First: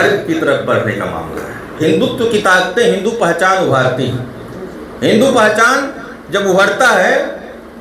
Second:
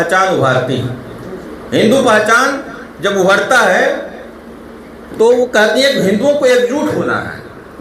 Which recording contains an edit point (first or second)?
first